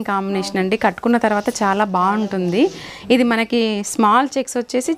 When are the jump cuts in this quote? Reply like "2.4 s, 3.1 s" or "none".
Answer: 2.9 s